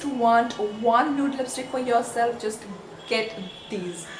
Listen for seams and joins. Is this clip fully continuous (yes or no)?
yes